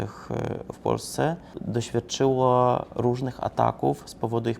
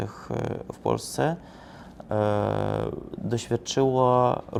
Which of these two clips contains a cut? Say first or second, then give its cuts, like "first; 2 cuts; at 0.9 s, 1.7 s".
first; 1 cut; at 1.5 s